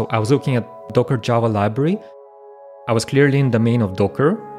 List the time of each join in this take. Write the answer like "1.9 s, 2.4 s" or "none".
0.8 s, 2.4 s